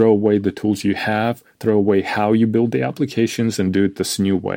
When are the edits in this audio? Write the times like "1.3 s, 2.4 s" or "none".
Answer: none